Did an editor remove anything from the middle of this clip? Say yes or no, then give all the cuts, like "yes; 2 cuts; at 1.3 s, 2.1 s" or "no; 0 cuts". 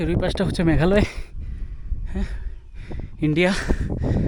no; 0 cuts